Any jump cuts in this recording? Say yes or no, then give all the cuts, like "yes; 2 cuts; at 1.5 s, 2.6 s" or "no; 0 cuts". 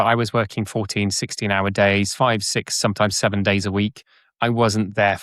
no; 0 cuts